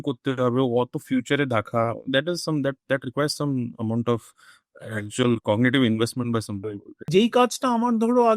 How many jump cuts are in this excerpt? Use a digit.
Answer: 1